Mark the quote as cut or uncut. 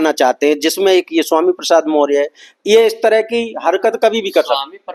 uncut